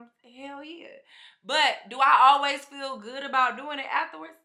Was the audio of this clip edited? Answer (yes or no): no